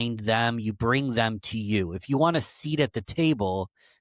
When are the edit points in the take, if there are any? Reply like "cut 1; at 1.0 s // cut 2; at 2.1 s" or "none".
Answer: none